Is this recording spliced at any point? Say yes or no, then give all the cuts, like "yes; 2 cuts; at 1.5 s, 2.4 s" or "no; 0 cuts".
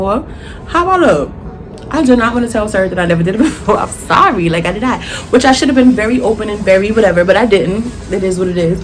no; 0 cuts